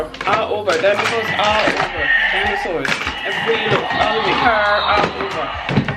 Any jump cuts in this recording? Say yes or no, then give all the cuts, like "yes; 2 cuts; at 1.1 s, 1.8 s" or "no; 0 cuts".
no; 0 cuts